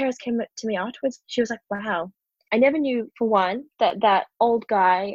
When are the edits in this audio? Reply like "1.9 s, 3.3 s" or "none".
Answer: 1.2 s, 2.3 s